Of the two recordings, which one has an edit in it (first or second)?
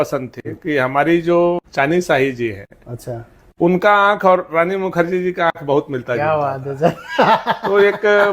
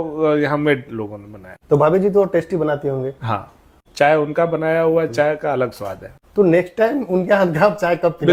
first